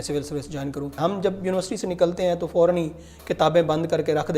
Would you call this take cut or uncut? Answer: cut